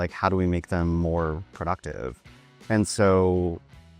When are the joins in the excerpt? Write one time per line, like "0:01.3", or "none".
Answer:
none